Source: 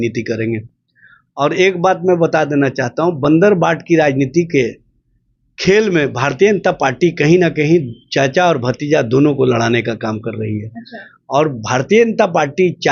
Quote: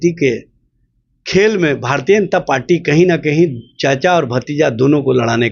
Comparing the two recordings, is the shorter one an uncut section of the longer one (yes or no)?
yes